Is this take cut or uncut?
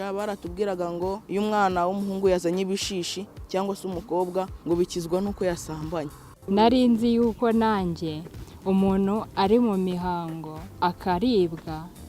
cut